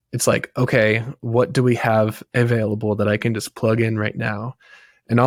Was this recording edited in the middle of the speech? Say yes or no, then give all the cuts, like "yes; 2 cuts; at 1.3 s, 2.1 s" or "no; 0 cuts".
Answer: no; 0 cuts